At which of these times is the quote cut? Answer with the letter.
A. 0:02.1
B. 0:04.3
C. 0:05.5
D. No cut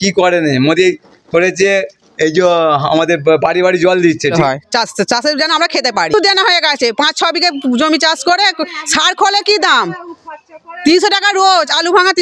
B